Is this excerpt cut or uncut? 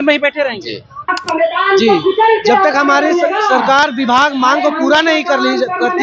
cut